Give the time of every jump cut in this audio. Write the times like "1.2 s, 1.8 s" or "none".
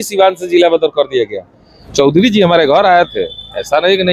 1.8 s